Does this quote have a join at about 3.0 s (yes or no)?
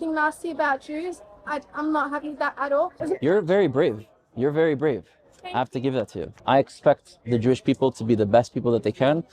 yes